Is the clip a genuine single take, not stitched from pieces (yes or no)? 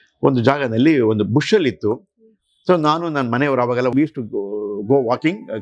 no